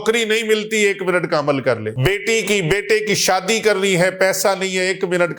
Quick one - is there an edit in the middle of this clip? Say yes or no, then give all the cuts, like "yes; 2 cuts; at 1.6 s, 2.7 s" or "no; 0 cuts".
yes; 1 cut; at 1.9 s